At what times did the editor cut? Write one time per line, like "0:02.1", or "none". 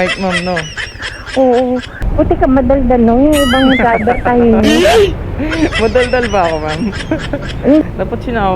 0:02.0
0:07.8